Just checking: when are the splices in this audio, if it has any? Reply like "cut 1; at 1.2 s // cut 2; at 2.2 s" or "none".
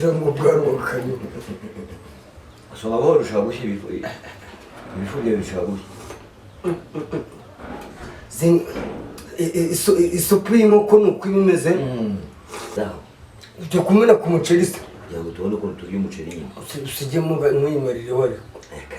cut 1; at 12.7 s